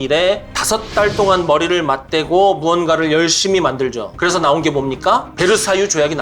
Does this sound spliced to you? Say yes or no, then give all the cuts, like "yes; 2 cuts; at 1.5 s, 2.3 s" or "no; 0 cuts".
yes; 1 cut; at 5.3 s